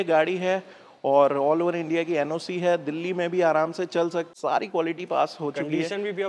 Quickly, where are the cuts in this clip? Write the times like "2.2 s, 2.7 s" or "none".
4.3 s